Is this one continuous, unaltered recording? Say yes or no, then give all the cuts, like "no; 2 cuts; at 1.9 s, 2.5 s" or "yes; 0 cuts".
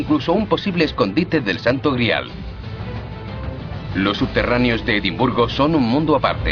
yes; 0 cuts